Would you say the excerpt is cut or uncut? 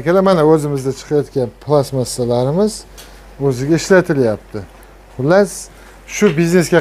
uncut